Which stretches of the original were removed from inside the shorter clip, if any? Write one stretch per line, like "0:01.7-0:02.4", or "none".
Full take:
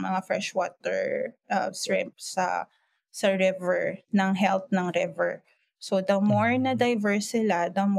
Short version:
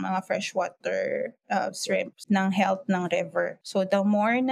0:02.2-0:04.0
0:05.4-0:05.8